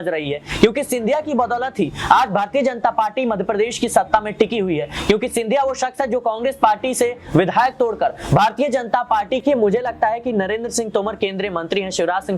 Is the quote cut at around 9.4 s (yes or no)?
yes